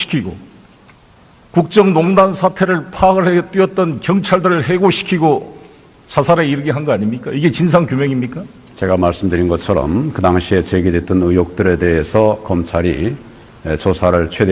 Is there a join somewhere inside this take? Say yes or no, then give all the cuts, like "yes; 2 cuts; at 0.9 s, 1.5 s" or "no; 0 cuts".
yes; 1 cut; at 2.7 s